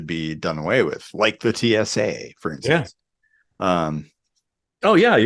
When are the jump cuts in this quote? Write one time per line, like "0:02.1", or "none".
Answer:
none